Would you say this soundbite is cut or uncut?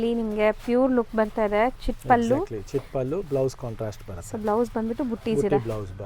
uncut